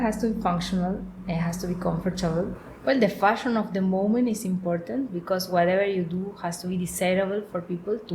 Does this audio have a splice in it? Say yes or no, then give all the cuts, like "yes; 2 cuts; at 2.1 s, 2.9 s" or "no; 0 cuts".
yes; 1 cut; at 2.6 s